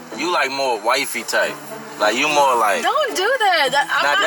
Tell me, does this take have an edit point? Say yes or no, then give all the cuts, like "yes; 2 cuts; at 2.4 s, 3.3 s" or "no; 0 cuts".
no; 0 cuts